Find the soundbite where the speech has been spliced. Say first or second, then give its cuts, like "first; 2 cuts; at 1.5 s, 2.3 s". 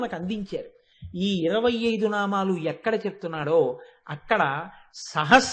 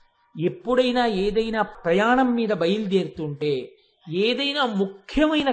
second; 1 cut; at 1.7 s